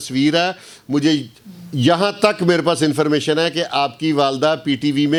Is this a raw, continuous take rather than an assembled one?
yes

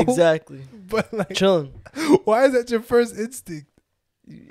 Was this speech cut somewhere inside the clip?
no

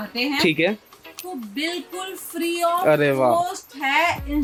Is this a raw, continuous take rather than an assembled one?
yes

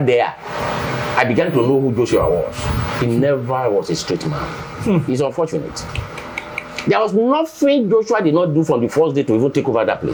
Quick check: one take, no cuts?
yes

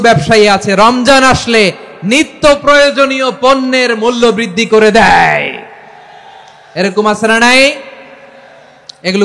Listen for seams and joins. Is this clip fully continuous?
yes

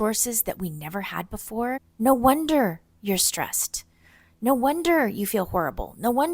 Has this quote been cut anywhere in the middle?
yes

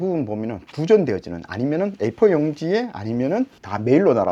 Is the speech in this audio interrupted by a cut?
no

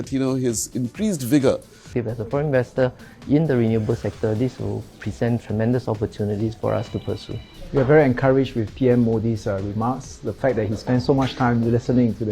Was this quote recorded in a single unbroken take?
no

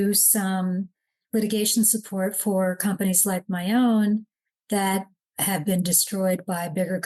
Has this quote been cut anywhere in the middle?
no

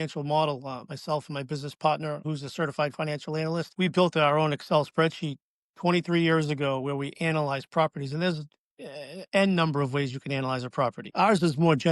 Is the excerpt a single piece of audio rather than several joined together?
no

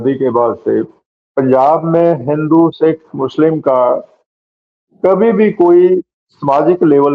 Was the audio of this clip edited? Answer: no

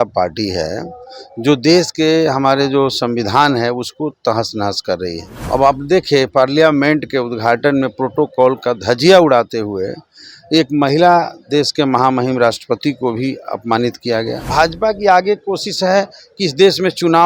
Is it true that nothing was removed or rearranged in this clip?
no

